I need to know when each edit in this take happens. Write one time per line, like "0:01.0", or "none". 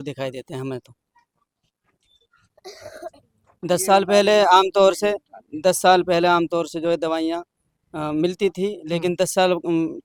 none